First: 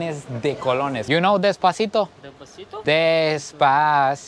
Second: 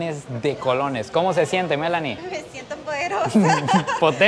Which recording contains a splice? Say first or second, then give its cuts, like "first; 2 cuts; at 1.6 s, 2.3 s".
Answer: first; 1 cut; at 1.1 s